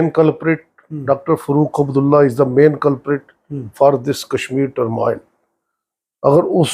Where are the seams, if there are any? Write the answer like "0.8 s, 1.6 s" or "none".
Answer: none